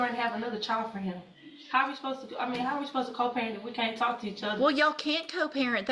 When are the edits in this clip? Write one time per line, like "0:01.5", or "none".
0:01.3